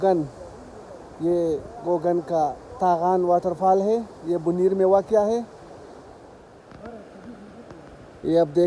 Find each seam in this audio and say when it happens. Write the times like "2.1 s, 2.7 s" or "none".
none